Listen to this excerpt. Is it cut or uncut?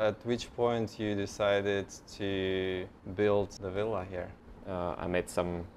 cut